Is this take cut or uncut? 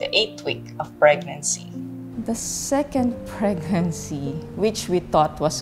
cut